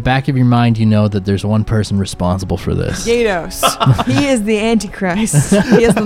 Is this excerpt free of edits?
no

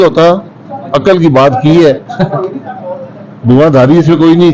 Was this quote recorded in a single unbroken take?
yes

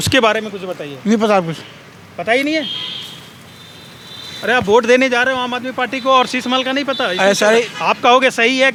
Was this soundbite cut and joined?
no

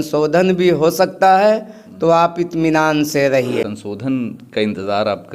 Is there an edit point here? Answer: yes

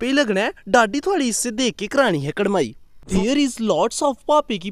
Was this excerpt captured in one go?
no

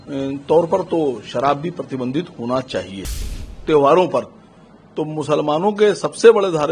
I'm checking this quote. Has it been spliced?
yes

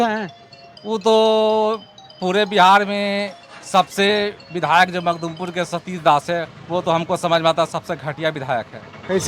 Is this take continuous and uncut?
yes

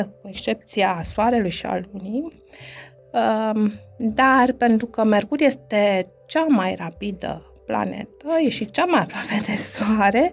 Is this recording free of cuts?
yes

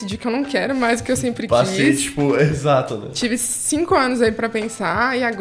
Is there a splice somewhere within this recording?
no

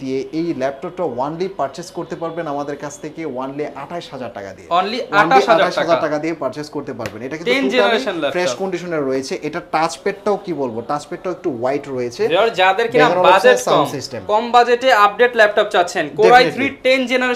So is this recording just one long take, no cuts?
yes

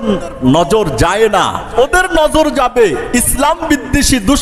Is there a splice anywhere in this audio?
yes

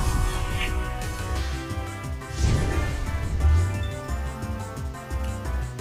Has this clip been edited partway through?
no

